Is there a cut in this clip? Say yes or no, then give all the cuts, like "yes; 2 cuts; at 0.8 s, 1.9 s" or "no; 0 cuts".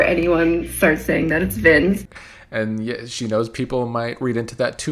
no; 0 cuts